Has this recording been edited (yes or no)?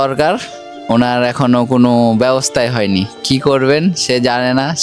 no